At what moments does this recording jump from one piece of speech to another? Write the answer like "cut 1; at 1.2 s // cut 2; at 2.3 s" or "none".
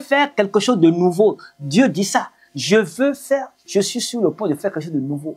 none